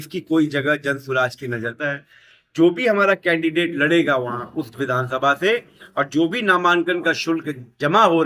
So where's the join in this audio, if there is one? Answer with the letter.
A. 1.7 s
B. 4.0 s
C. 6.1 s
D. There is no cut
A